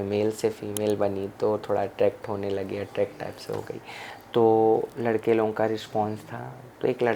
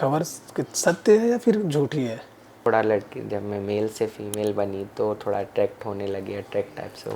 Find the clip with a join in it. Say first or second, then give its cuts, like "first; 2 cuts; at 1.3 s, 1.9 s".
second; 1 cut; at 2.6 s